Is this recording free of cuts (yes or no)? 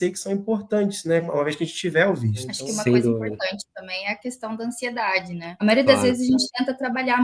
no